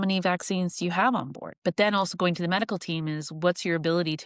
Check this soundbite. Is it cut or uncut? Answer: cut